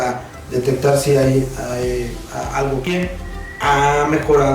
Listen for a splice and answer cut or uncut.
cut